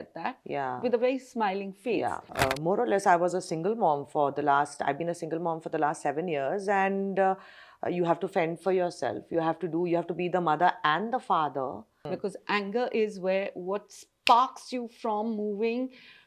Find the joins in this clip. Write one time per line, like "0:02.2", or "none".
0:02.3
0:12.1